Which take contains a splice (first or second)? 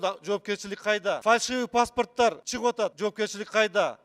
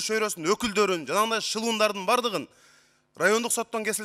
first